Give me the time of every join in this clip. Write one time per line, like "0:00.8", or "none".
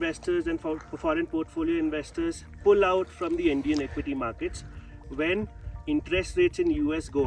none